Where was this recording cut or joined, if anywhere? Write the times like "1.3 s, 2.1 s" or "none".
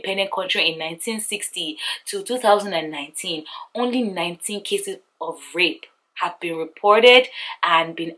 none